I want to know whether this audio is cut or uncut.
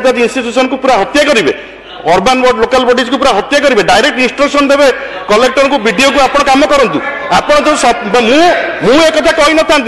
uncut